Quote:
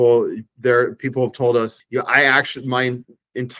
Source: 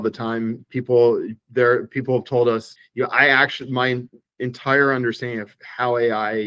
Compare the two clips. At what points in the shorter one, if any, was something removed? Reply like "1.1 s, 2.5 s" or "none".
1.8 s

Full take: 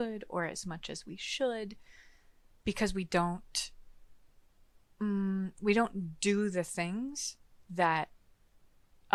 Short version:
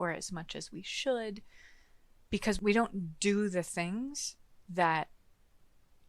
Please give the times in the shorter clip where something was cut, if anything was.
2.6 s

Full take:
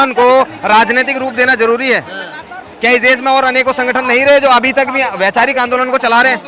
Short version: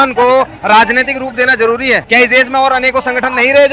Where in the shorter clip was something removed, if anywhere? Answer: 2.0 s

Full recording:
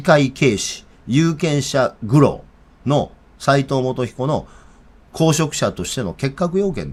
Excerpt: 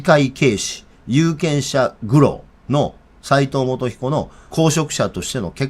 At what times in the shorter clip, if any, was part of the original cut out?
2.5 s, 4.4 s

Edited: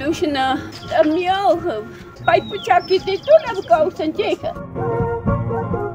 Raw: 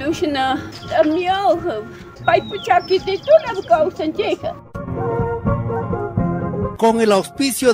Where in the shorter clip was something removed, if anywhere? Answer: 4.6 s

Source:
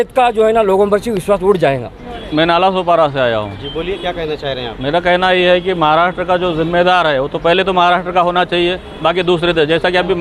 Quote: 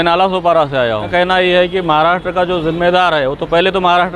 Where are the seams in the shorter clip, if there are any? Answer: 1.1 s

